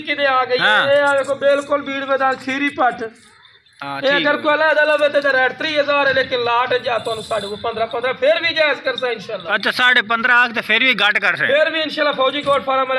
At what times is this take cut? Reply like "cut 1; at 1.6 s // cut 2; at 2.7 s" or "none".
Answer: none